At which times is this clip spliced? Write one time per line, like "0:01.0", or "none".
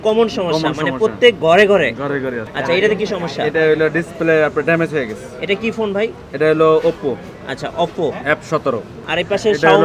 0:02.5
0:09.0

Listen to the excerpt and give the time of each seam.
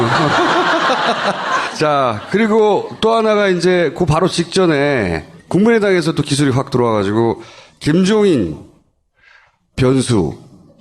0:03.2

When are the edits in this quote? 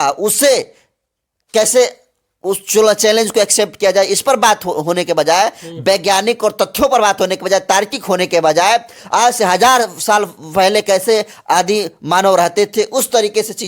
none

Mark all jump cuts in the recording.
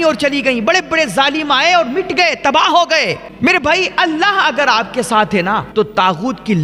0:03.3
0:05.7

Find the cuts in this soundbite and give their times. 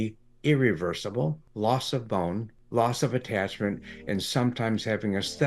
0:01.4
0:02.5

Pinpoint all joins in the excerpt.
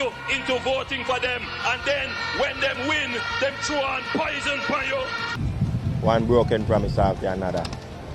0:05.3

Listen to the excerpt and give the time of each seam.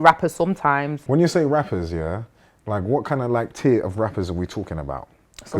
0:01.0

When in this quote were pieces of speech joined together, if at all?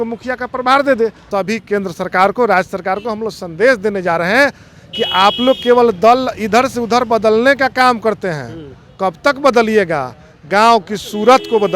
0:01.2

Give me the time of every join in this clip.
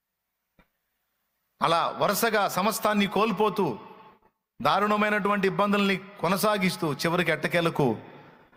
none

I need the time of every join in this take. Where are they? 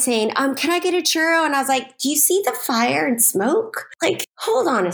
0:03.8

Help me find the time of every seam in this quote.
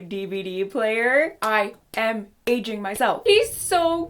0:03.2

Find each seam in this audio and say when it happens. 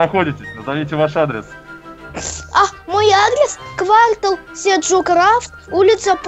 none

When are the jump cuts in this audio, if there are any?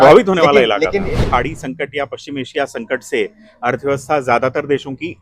0:01.2

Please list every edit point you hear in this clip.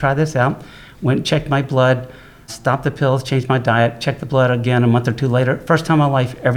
0:02.5

